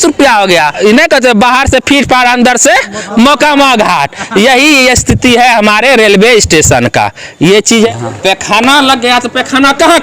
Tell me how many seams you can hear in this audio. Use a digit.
2